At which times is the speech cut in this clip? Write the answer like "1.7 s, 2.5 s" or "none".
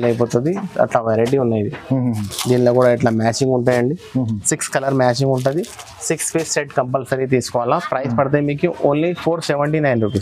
none